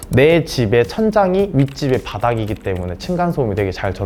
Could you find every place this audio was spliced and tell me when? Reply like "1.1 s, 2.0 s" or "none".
none